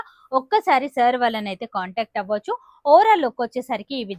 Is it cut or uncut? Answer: uncut